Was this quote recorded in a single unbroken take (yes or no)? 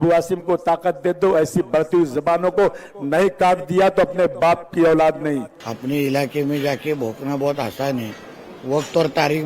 no